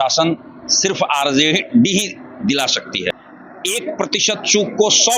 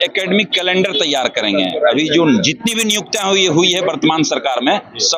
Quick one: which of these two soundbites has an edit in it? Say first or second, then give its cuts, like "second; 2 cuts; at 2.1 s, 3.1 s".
first; 1 cut; at 3.1 s